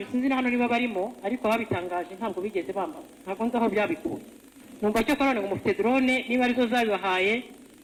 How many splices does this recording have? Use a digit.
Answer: 0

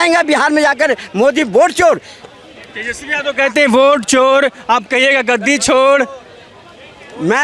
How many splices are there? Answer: 0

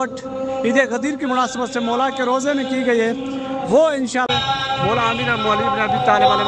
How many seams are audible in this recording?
1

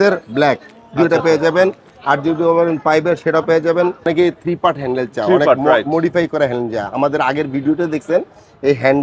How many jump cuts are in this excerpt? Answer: 1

